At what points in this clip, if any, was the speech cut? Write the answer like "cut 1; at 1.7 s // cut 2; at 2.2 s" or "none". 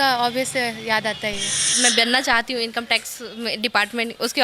cut 1; at 1.7 s